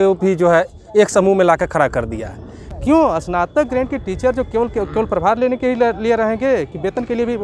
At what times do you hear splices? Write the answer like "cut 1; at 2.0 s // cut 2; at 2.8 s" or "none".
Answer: cut 1; at 2.7 s